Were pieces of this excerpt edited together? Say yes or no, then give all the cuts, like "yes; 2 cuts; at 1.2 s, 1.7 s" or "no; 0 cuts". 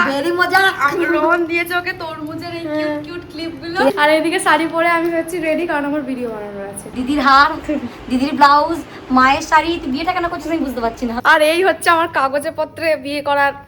yes; 3 cuts; at 3.9 s, 6.8 s, 11.2 s